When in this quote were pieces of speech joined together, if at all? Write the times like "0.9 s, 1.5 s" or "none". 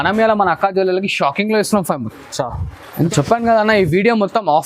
3.1 s